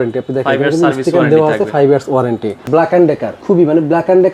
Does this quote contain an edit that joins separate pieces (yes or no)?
yes